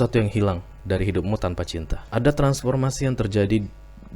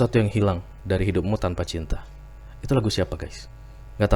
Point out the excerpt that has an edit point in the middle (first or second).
first